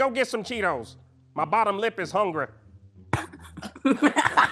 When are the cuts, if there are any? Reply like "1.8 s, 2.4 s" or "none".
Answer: none